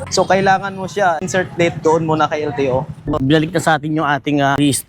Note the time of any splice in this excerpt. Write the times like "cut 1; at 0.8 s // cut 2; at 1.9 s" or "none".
cut 1; at 3.1 s